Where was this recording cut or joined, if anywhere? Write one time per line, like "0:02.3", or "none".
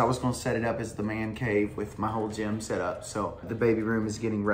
0:03.5